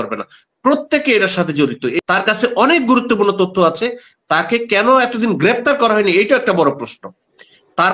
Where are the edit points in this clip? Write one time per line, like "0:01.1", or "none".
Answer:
0:01.9